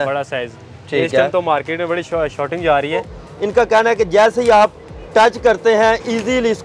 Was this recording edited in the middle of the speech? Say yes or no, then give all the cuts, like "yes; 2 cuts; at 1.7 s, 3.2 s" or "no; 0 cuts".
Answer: yes; 1 cut; at 3.1 s